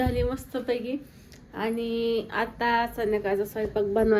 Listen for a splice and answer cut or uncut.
uncut